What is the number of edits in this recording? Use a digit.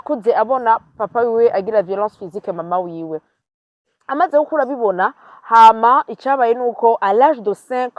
0